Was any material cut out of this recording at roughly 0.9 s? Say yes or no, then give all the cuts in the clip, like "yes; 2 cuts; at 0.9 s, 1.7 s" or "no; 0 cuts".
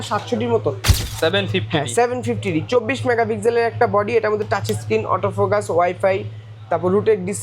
yes; 1 cut; at 0.9 s